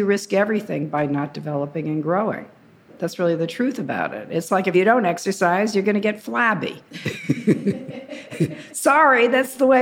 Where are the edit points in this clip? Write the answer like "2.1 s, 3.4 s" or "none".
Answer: 3.0 s, 4.7 s